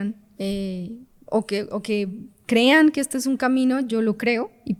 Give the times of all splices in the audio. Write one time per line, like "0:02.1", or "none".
none